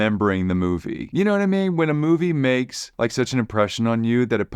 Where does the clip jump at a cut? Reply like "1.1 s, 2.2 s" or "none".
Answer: 1.0 s, 2.8 s